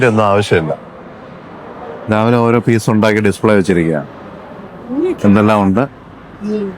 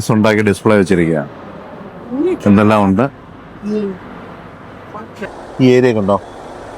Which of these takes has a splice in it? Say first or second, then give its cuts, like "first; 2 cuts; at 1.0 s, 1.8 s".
second; 1 cut; at 5.2 s